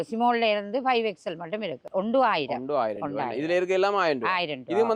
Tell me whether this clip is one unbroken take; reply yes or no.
yes